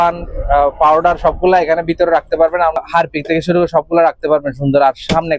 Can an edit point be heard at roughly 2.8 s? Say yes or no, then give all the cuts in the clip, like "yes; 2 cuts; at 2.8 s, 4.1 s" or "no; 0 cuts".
yes; 1 cut; at 2.8 s